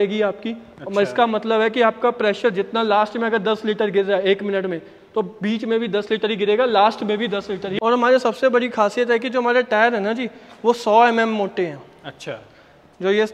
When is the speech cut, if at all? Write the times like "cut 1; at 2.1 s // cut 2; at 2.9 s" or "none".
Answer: cut 1; at 7.8 s